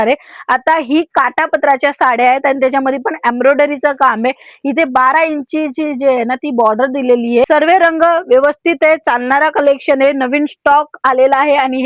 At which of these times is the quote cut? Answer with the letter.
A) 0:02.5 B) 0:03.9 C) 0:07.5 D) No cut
C